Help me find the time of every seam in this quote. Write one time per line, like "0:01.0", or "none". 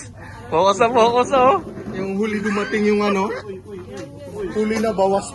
none